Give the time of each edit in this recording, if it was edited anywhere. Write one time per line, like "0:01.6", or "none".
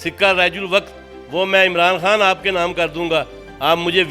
none